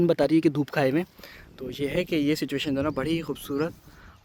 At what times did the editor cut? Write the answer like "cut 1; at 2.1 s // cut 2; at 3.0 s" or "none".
none